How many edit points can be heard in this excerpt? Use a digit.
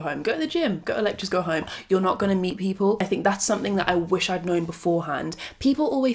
1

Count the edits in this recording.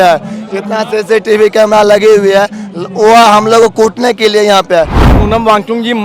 1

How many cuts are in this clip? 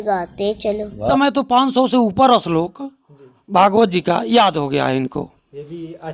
1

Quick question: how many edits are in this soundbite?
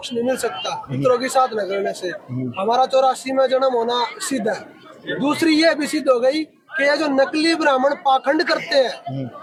0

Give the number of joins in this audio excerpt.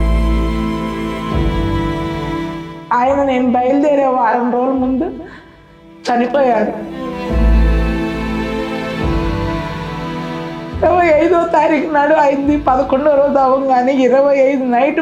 0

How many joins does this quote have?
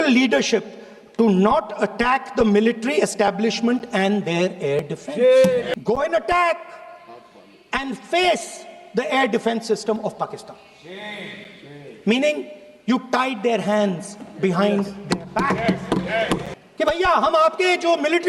2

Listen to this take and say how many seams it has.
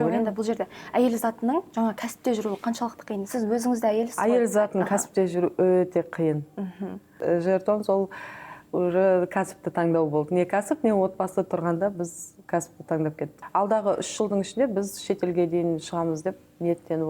2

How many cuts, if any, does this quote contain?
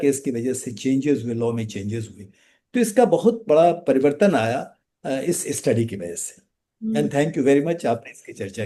0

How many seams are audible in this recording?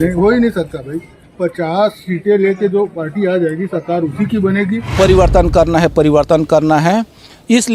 1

